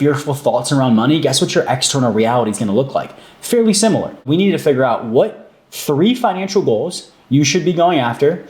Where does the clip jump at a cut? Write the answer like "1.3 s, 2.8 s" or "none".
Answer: 4.2 s